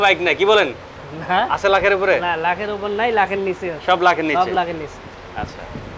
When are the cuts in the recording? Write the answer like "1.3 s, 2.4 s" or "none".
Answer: none

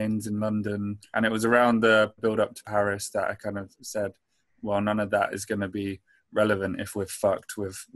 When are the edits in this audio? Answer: 1.0 s, 2.4 s

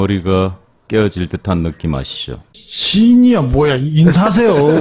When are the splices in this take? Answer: none

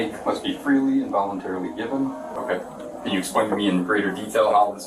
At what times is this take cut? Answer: 2.3 s

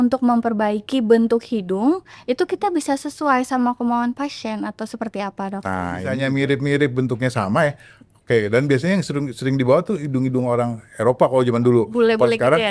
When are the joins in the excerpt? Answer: 6.1 s

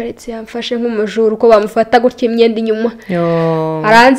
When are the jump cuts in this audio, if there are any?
none

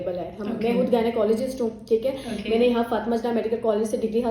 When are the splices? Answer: none

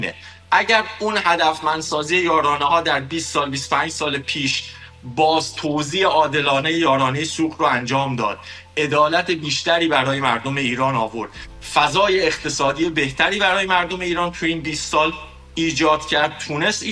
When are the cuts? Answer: 10.0 s

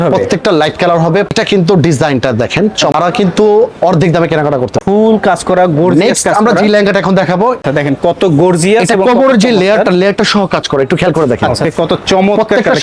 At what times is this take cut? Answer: 1.3 s, 2.9 s, 4.8 s, 7.6 s, 11.6 s

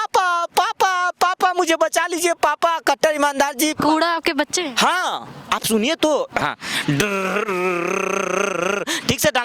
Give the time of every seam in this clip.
6.4 s

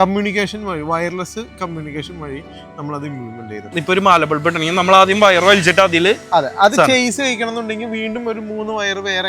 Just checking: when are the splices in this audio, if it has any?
3.8 s

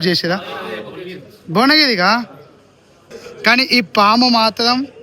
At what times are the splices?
3.2 s

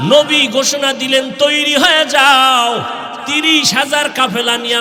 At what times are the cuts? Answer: none

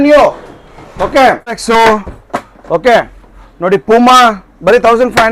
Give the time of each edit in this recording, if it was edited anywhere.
1.6 s

